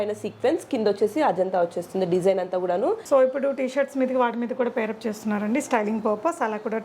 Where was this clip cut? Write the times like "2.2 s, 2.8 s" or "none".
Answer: 3.0 s